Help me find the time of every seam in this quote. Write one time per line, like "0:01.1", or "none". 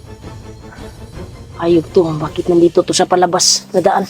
0:01.2